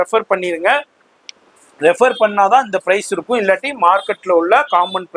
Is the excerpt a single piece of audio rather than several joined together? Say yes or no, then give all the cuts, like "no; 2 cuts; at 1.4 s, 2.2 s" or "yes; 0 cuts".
yes; 0 cuts